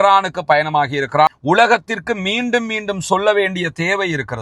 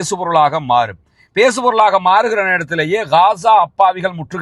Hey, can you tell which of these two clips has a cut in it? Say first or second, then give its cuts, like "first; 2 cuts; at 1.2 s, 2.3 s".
first; 1 cut; at 1.4 s